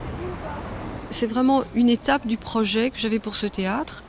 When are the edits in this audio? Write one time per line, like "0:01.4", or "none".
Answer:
none